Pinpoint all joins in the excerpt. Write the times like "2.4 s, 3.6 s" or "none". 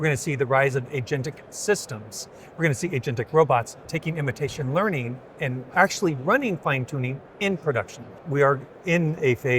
3.9 s, 8.2 s